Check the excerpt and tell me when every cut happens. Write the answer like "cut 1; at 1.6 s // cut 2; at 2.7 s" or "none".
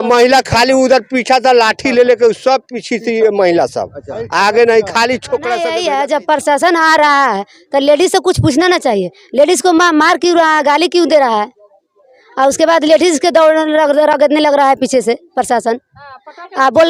cut 1; at 5.6 s